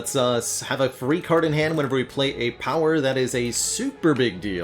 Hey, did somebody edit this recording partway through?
no; 0 cuts

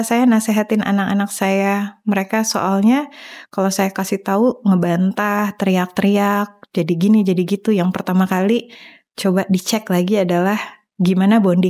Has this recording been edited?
no; 0 cuts

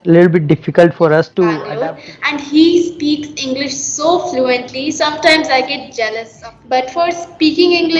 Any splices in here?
yes; 2 cuts; at 1.6 s, 6.2 s

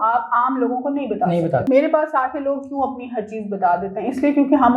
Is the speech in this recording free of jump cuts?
no; 1 cut; at 1.6 s

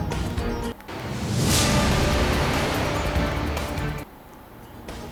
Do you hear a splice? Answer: no; 0 cuts

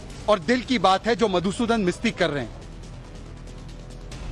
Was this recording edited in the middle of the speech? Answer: no; 0 cuts

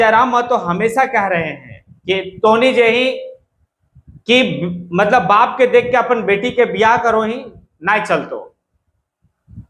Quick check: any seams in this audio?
no; 0 cuts

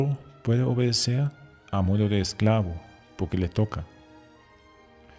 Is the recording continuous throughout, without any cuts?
no; 1 cut; at 2.1 s

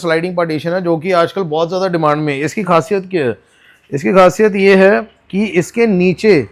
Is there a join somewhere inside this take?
no; 0 cuts

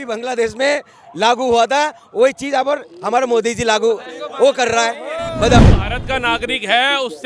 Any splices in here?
yes; 1 cut; at 5.6 s

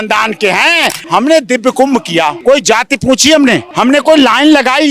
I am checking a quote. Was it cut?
yes; 3 cuts; at 1.0 s, 2.4 s, 3.7 s

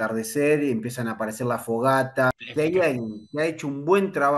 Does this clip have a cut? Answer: yes; 1 cut; at 2.3 s

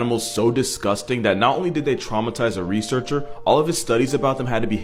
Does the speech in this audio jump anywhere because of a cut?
no; 0 cuts

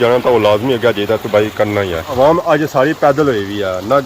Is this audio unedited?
no; 1 cut; at 2.1 s

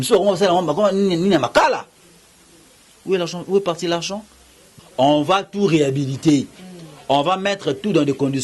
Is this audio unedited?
no; 1 cut; at 4.7 s

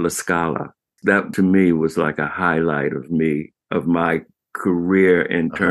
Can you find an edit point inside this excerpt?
yes; 1 cut; at 1.2 s

